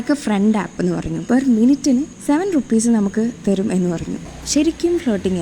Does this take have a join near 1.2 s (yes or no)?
yes